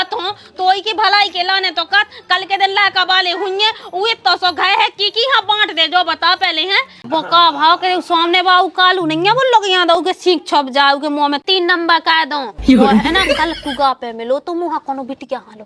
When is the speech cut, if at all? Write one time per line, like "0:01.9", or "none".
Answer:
0:07.0